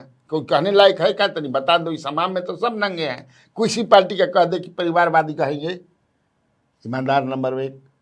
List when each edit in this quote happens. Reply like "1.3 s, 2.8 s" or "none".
none